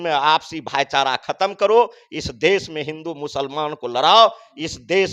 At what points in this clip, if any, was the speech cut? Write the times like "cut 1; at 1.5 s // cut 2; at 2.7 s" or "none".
none